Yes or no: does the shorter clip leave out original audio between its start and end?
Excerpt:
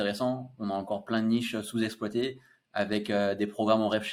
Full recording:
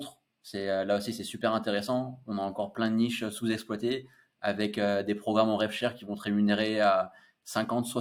no